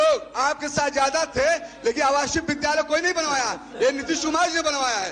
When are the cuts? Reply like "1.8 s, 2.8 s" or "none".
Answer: none

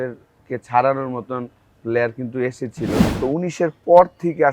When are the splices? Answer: 3.1 s

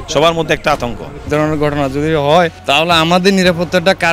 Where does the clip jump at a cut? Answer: 1.3 s, 2.6 s

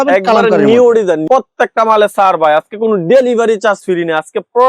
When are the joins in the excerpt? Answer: 1.2 s

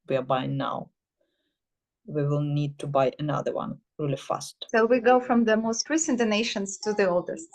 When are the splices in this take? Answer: 4.5 s

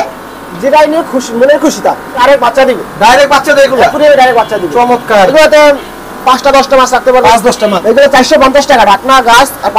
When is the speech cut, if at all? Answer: 2.2 s, 5.3 s, 7.8 s

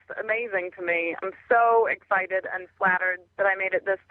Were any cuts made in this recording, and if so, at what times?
1.2 s, 3.2 s

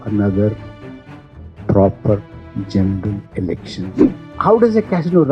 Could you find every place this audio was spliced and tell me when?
4.0 s

